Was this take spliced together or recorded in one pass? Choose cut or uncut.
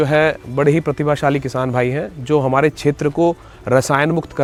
uncut